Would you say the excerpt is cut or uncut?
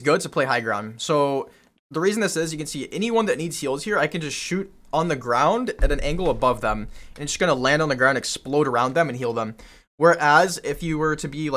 uncut